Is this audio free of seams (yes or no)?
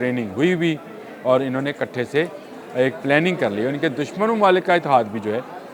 yes